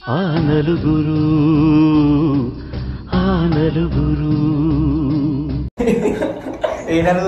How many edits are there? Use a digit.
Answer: 0